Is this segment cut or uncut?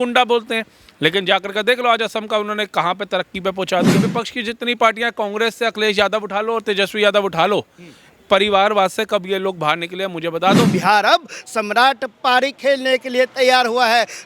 cut